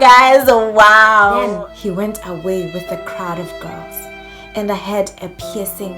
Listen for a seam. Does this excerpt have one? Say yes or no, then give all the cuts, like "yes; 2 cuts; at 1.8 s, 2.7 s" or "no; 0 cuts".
yes; 1 cut; at 1.5 s